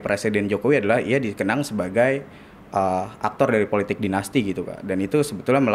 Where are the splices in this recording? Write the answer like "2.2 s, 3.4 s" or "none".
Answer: none